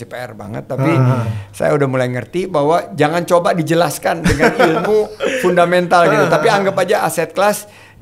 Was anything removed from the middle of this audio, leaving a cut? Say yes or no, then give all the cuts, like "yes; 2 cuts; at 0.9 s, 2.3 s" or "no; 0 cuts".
no; 0 cuts